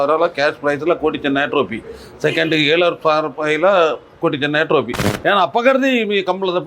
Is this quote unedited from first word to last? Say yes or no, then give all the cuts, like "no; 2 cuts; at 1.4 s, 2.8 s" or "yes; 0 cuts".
no; 1 cut; at 5.1 s